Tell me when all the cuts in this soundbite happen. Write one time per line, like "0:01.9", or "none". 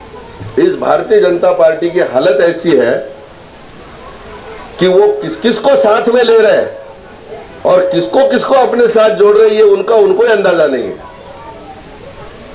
none